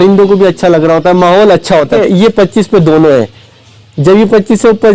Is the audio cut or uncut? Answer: cut